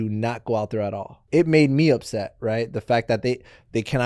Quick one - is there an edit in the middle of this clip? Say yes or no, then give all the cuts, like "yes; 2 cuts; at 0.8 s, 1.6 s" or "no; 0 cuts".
yes; 1 cut; at 1.2 s